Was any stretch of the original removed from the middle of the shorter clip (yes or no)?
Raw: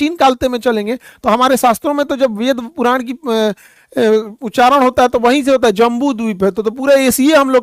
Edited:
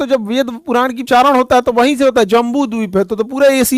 yes